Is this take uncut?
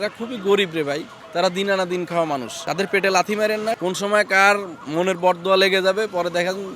no; 3 cuts; at 1.2 s, 2.6 s, 3.8 s

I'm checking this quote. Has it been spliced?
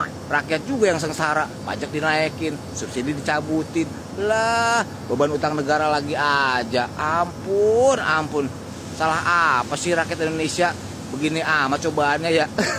no; 0 cuts

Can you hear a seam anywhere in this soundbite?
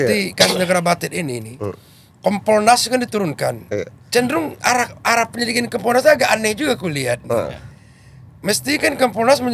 no; 0 cuts

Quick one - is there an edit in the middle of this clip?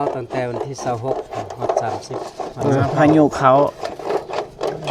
no; 0 cuts

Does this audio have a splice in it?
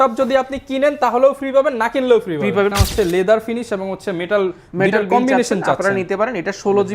yes; 1 cut; at 2.7 s

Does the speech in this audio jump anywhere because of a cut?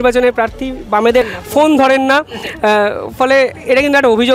yes; 1 cut; at 1.3 s

